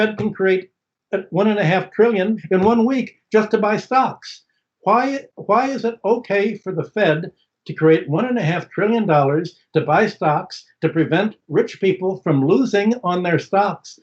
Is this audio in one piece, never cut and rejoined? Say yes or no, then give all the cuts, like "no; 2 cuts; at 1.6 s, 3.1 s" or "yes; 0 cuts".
no; 1 cut; at 2.4 s